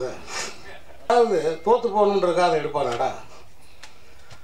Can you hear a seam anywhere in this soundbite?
yes; 1 cut; at 1.1 s

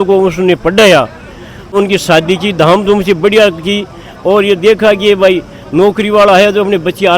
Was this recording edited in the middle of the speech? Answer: yes; 1 cut; at 1.7 s

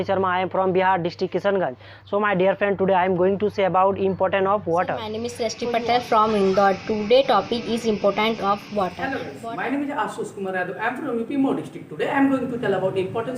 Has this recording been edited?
yes; 2 cuts; at 5.2 s, 9.0 s

